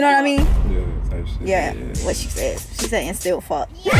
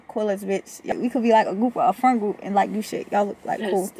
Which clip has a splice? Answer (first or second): second